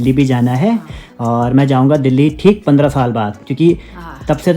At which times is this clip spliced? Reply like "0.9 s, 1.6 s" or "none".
none